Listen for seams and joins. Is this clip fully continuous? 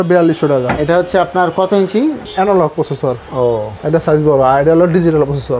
no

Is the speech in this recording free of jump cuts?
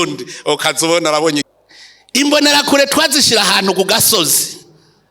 no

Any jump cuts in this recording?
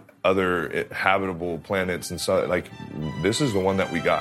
no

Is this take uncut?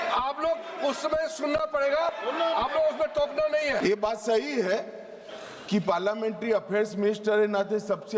no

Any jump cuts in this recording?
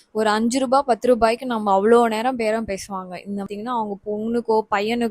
yes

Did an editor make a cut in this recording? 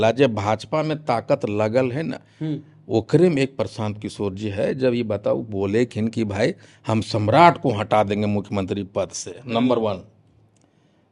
no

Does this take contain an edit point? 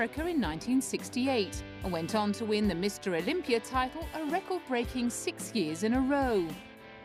no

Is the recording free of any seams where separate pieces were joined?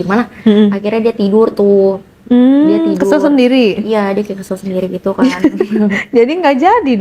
yes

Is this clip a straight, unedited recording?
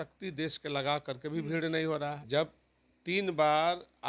no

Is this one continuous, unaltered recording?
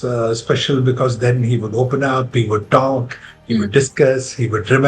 yes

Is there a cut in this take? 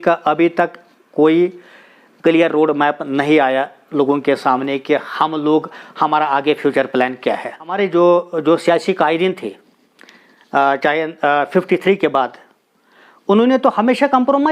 yes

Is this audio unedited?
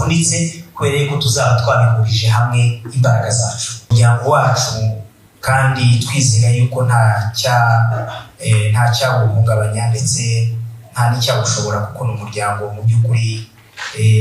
no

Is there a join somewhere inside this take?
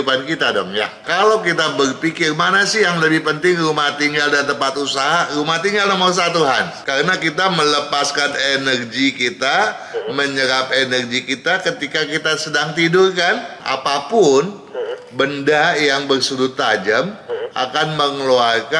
yes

